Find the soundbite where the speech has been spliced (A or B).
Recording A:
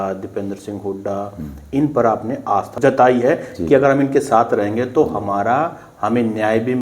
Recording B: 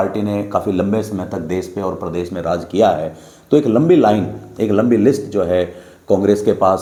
A